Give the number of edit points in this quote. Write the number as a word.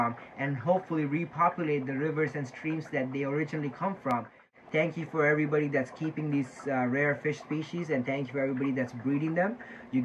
one